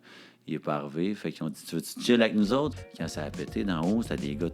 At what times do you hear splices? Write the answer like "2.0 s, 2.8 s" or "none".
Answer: 2.7 s